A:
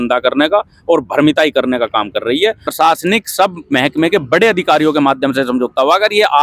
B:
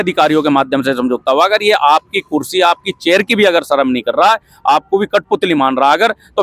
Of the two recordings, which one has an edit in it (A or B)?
A